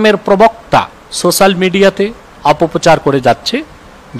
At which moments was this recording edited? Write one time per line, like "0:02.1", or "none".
0:01.0
0:02.2

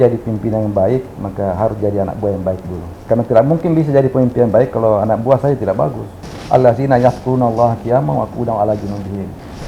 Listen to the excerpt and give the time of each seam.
0:03.0
0:06.3

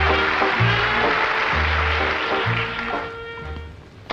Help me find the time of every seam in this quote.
0:01.7

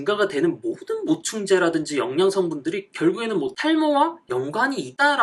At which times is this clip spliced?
none

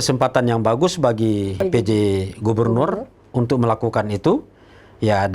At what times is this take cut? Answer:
0:01.6

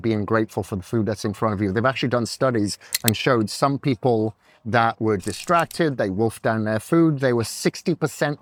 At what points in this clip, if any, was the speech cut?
none

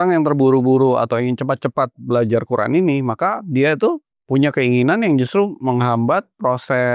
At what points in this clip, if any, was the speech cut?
0:04.1

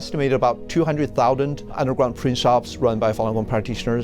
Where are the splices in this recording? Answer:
0:01.8

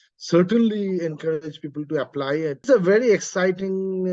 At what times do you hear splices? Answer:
0:02.6

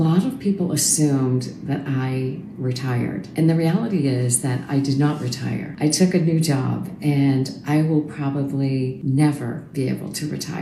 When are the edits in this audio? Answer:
none

